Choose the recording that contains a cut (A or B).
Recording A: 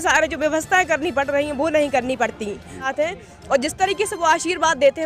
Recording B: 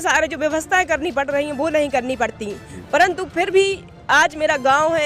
A